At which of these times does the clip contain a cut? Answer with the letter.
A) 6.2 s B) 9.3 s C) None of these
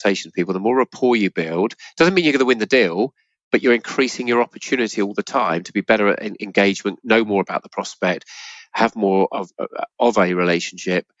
C